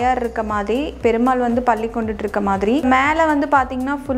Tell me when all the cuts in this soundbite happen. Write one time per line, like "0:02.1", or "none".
0:02.8

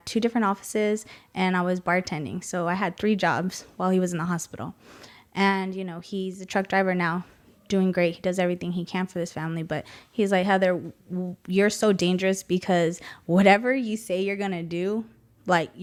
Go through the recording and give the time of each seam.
none

